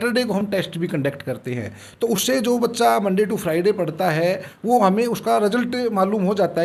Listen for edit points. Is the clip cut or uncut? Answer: uncut